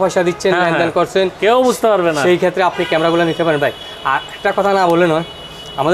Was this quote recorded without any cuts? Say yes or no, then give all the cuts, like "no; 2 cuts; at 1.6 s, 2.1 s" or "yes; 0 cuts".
yes; 0 cuts